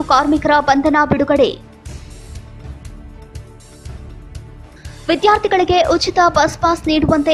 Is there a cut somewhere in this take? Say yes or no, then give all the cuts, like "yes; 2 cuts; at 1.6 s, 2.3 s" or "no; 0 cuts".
no; 0 cuts